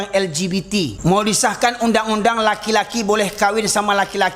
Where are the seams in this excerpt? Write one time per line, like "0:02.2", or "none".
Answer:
0:00.9